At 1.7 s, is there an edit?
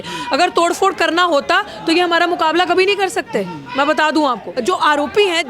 no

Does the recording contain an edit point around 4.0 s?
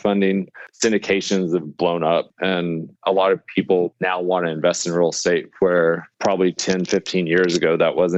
yes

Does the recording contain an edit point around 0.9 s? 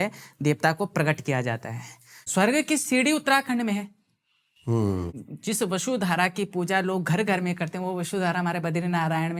no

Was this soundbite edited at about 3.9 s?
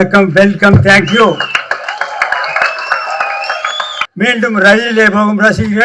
yes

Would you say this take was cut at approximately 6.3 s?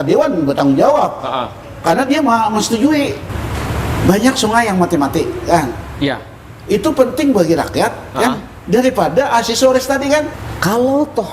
no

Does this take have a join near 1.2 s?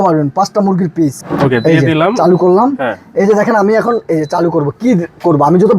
yes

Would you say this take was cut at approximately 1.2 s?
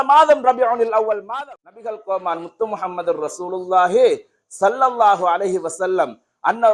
yes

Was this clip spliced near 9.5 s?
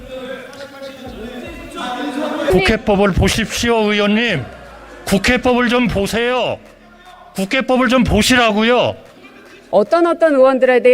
yes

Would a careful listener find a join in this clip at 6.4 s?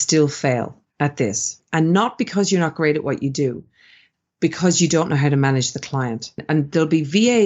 yes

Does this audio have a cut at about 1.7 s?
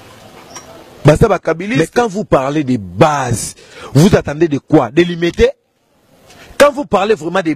yes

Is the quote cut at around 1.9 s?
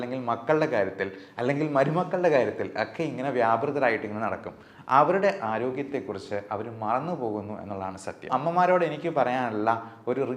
no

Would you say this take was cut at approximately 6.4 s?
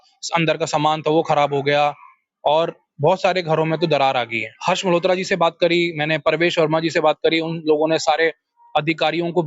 no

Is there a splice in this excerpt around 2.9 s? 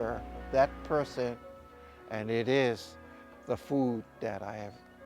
no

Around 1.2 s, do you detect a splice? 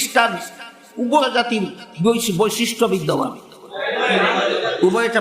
yes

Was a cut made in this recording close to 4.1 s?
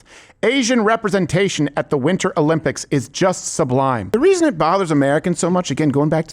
yes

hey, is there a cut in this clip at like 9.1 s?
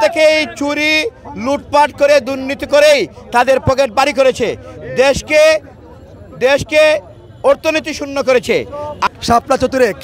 yes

